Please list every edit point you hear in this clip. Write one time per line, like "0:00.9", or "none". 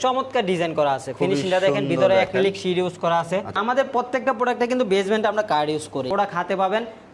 0:03.6
0:06.1